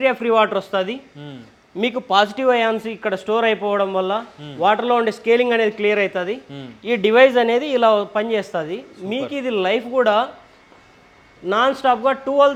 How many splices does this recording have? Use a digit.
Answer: 0